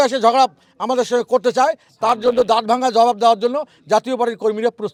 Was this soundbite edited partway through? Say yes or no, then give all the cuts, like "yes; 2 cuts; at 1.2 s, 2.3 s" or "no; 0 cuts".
no; 0 cuts